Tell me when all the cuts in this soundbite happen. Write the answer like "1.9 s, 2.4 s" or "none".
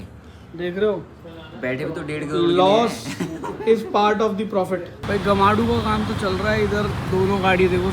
5.1 s

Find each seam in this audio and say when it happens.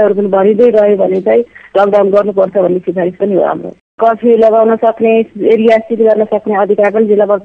4.0 s

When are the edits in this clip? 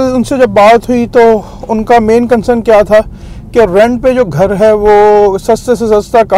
none

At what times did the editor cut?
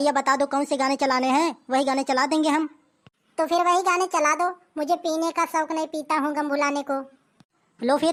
none

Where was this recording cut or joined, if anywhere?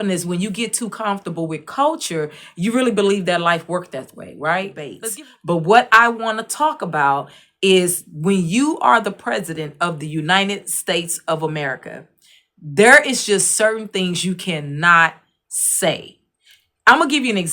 4.9 s

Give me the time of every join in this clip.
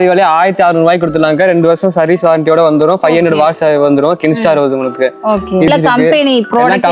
5.7 s

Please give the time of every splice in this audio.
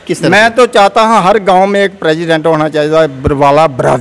none

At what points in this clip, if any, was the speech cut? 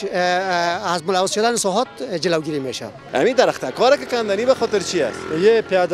3.0 s

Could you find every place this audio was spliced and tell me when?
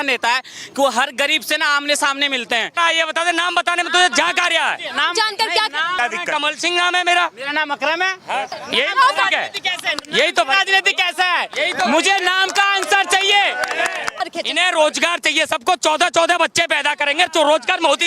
2.7 s, 6.0 s, 8.6 s, 14.2 s

